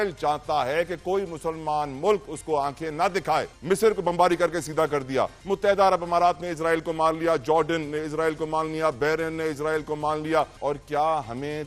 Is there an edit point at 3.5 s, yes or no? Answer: yes